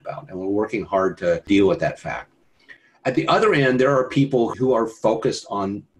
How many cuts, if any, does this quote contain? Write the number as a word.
two